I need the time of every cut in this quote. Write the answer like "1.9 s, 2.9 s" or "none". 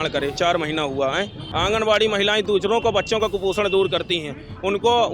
1.4 s